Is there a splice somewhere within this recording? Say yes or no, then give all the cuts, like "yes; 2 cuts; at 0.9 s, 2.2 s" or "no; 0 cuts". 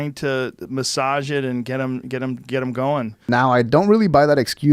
no; 0 cuts